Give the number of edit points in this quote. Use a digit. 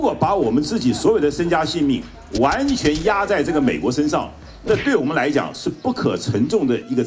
0